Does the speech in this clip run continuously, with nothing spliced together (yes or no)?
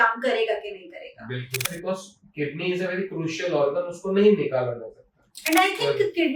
no